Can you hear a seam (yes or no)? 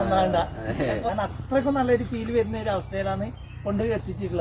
yes